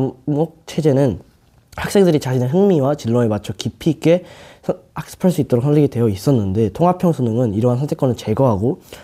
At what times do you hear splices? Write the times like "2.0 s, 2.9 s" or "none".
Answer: none